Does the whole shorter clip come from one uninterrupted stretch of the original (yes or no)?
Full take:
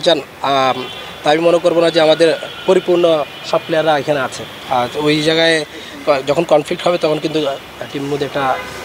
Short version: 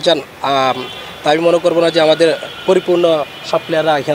yes